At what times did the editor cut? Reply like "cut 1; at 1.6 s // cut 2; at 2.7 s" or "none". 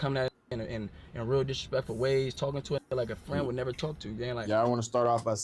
cut 1; at 4.4 s